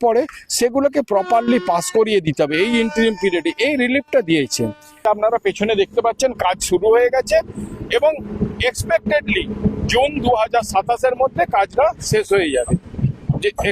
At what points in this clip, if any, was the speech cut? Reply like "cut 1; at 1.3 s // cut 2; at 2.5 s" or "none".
cut 1; at 5.0 s